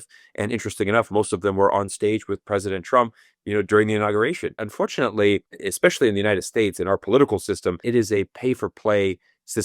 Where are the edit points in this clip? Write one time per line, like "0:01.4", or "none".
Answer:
0:04.6
0:05.6
0:07.8